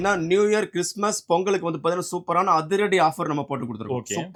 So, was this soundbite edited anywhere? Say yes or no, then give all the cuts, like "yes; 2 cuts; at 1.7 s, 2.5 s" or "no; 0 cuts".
no; 0 cuts